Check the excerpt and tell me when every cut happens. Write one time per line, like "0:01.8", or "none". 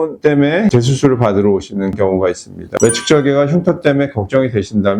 0:02.7